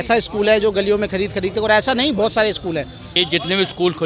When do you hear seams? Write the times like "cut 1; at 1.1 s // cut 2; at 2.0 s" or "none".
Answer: cut 1; at 3.0 s